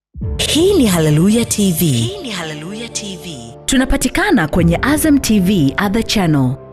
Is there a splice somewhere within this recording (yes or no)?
no